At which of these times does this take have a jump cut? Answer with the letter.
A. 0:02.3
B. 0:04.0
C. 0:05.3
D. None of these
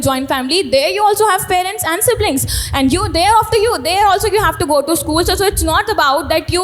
D